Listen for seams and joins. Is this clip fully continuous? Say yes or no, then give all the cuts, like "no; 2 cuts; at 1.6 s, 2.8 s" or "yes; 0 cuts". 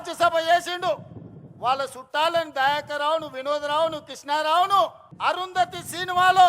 no; 1 cut; at 5.1 s